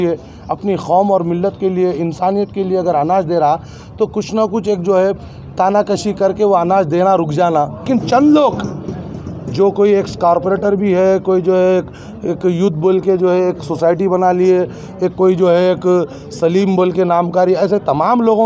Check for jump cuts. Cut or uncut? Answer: cut